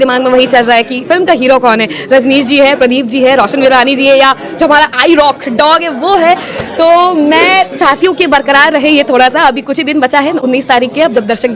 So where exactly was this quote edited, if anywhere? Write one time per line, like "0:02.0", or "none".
none